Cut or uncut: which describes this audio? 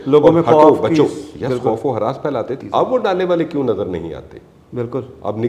cut